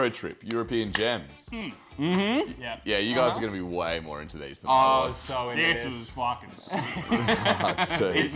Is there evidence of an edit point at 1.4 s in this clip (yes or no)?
no